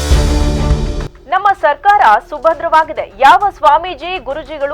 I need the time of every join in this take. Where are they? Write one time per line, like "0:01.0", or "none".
0:01.0